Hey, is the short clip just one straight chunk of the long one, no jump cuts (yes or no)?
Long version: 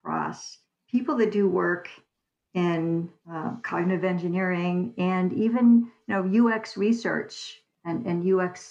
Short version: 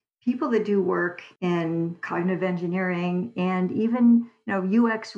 no